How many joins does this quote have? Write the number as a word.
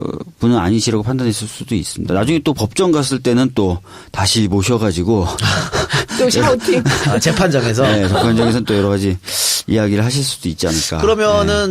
one